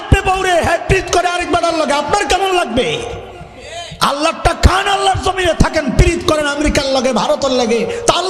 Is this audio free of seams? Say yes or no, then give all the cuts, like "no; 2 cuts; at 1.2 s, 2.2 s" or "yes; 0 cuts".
yes; 0 cuts